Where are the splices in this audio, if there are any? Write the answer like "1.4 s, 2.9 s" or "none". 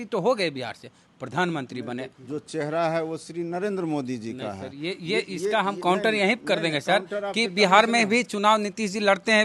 2.2 s